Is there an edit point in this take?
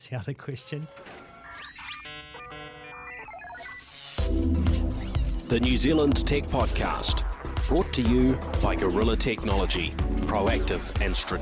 yes; 1 cut; at 0.9 s

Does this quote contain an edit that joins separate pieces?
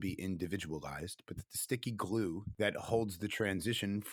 yes; 1 cut; at 2.5 s

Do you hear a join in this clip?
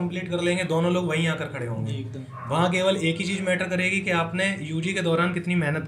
no; 0 cuts

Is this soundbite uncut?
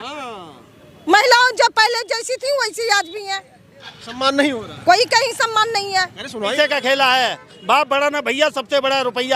no; 1 cut; at 6.5 s

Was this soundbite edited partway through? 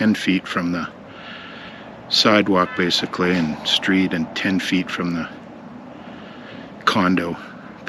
no; 0 cuts

